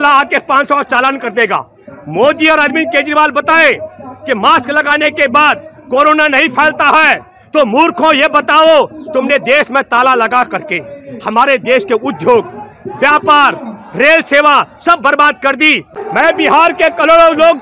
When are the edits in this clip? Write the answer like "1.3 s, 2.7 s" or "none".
15.9 s